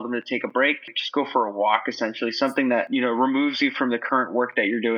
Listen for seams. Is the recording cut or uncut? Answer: cut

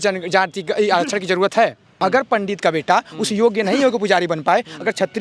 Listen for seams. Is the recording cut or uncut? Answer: cut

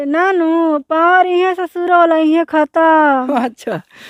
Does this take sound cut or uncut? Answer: uncut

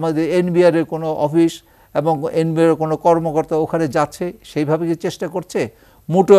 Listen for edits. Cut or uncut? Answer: uncut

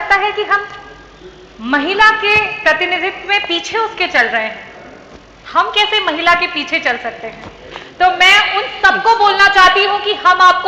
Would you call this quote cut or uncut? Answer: uncut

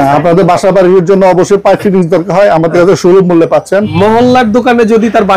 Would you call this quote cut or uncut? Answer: cut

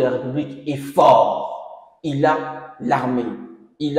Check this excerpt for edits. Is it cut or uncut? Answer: uncut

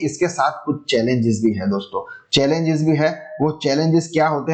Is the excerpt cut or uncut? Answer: uncut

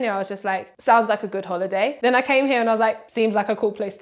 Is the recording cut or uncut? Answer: cut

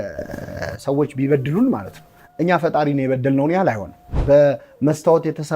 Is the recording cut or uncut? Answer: cut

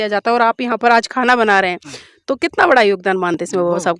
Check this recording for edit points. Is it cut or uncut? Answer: uncut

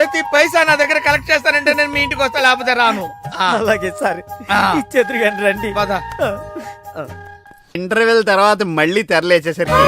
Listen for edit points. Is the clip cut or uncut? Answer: cut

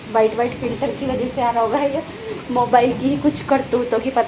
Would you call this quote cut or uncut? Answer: uncut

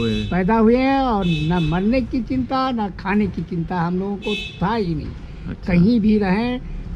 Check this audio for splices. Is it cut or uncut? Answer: uncut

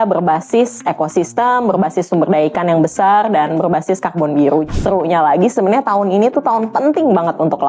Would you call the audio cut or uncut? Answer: cut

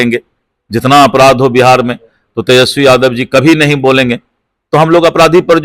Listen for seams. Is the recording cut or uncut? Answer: uncut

